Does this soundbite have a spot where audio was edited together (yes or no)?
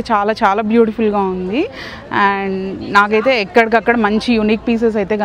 no